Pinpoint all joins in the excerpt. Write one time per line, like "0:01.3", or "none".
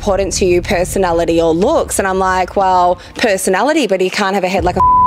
none